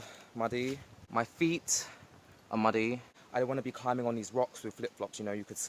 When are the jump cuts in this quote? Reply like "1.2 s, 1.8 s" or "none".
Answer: 0.9 s, 3.1 s